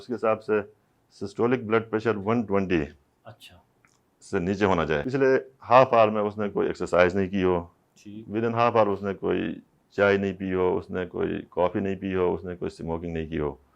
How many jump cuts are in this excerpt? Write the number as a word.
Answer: one